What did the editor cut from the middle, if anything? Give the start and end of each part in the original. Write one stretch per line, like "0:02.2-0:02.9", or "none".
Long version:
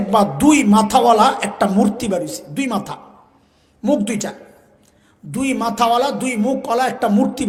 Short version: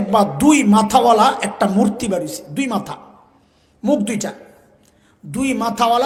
none